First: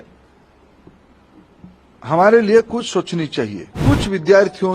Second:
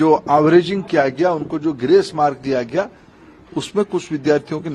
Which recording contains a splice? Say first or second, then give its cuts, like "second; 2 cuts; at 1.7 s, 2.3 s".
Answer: first; 1 cut; at 3.7 s